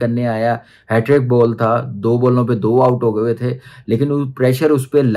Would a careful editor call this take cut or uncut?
uncut